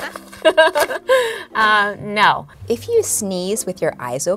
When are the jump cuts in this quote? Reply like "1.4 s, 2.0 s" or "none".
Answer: 2.5 s